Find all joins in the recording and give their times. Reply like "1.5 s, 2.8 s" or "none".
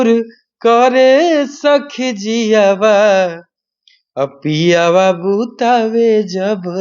none